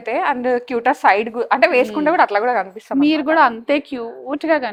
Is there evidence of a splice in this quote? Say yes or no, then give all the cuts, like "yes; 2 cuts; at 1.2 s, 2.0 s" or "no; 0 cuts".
no; 0 cuts